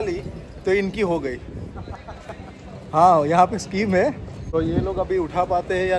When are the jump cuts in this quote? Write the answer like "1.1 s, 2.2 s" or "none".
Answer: 4.3 s